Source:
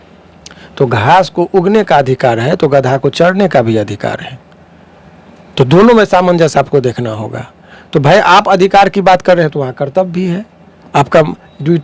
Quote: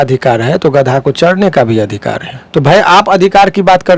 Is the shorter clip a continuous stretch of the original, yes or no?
no